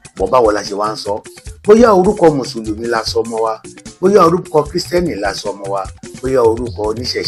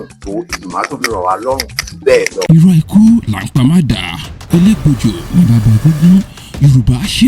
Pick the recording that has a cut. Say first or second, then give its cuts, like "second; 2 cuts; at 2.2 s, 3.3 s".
second; 1 cut; at 2.4 s